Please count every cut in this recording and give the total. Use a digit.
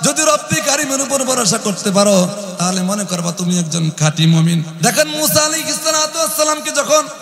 1